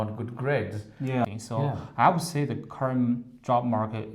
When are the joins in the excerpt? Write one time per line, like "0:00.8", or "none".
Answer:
0:01.2